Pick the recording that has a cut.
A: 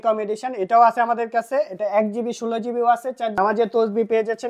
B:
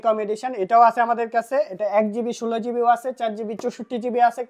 A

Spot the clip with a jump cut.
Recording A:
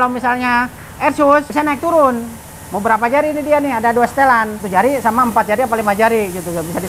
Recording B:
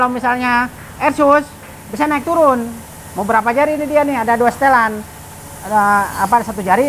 A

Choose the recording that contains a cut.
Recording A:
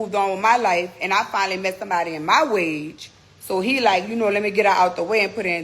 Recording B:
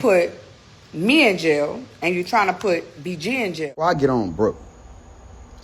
B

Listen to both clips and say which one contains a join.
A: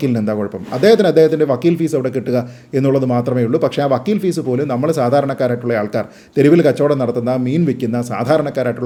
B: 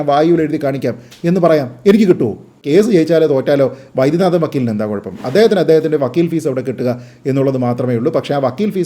B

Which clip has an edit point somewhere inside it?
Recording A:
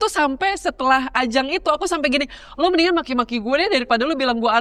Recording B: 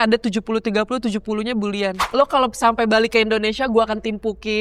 B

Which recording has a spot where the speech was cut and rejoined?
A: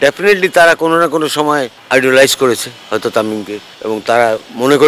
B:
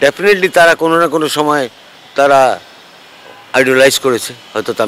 A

